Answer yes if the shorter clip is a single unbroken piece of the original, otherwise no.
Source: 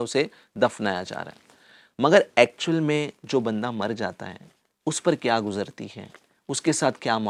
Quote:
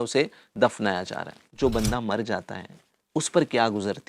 no